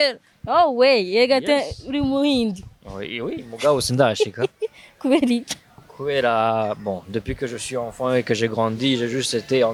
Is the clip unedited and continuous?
yes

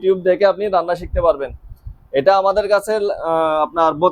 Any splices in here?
no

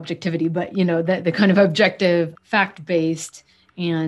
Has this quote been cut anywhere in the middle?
yes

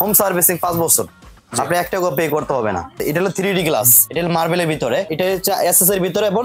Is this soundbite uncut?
no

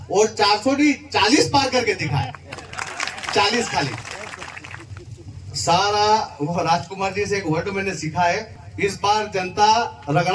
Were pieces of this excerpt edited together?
no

